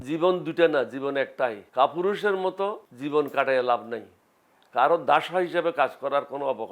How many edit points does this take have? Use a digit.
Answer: 2